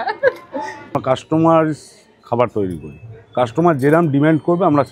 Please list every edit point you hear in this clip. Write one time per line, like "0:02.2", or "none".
0:01.0